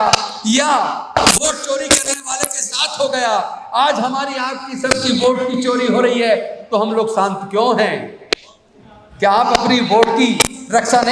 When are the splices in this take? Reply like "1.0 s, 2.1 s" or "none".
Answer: none